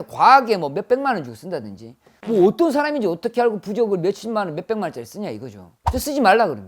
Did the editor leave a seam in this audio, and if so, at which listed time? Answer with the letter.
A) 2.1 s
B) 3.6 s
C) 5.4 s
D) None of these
A